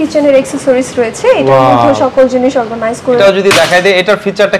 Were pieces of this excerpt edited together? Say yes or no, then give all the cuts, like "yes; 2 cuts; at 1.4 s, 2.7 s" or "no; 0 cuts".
yes; 1 cut; at 3.2 s